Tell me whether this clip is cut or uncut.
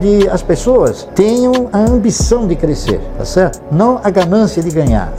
uncut